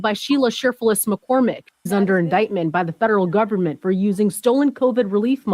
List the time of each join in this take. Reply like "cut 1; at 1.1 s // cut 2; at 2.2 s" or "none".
cut 1; at 1.9 s

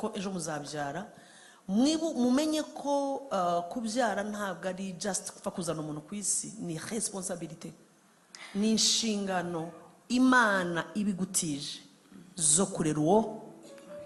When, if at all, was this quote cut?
none

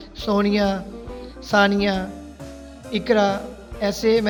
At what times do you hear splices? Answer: none

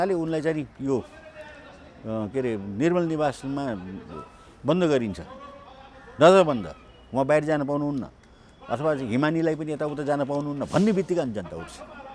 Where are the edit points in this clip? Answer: none

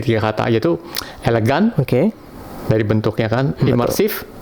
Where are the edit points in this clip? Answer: none

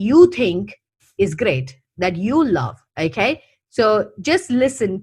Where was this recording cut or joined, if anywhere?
none

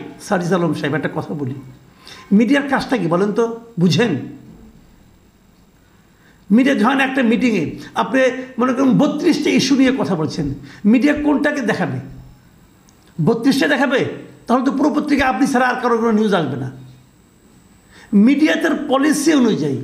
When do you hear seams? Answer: none

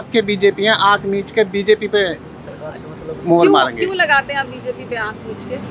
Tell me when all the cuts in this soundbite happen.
none

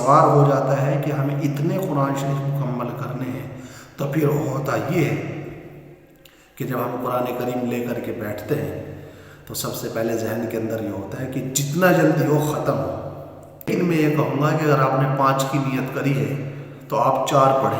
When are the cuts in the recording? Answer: cut 1; at 13.7 s

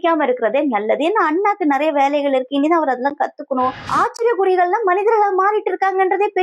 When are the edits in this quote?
cut 1; at 3.8 s

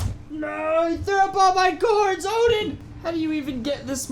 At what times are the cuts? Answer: cut 1; at 2.9 s

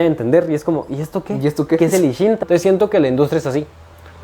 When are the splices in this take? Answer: cut 1; at 2.4 s

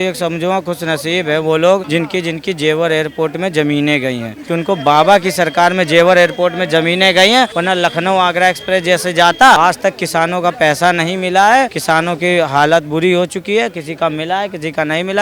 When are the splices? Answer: cut 1; at 1.9 s // cut 2; at 4.3 s // cut 3; at 7.5 s // cut 4; at 9.6 s // cut 5; at 11.8 s

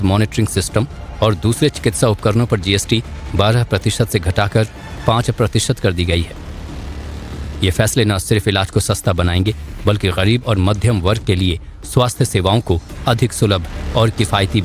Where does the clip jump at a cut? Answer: cut 1; at 13.8 s

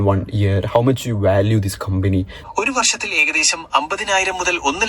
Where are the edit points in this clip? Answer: cut 1; at 2.4 s

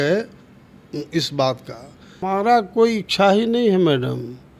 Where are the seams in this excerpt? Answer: cut 1; at 2.1 s

